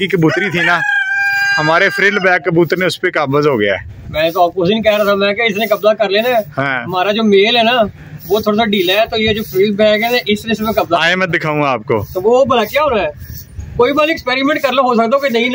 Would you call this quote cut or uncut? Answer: uncut